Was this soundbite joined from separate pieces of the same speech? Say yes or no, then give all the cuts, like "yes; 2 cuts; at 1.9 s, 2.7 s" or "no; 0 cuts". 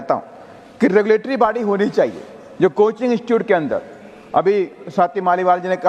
no; 0 cuts